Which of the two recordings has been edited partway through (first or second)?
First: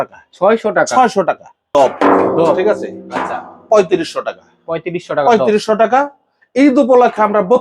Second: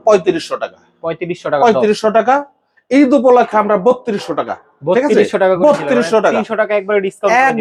first